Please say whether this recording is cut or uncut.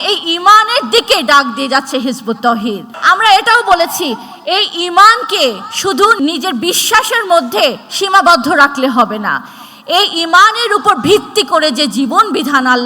cut